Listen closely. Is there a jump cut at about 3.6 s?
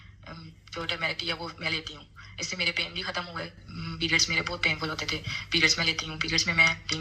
no; 0 cuts

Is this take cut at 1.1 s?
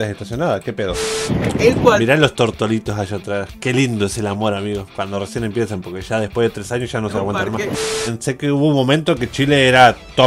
yes; 2 cuts; at 1.1 s, 7.8 s

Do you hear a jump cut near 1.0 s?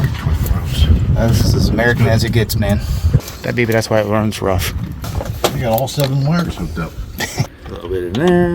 no; 3 cuts; at 3.3 s, 5.0 s, 7.6 s

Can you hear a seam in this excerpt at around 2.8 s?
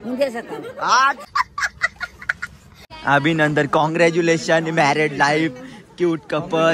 yes; 1 cut; at 2.8 s

